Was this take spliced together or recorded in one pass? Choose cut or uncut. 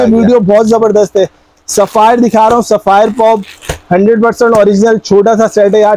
uncut